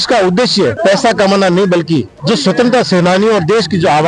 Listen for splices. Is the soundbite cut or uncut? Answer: cut